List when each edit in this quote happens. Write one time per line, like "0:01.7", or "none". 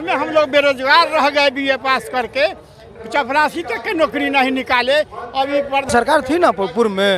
0:05.9